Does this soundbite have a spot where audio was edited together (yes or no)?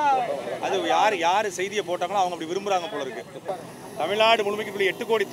yes